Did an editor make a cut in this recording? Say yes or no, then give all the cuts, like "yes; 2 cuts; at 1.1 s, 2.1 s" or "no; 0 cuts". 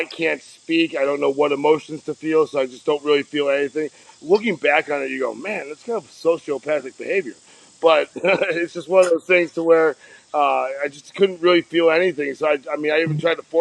yes; 1 cut; at 4.0 s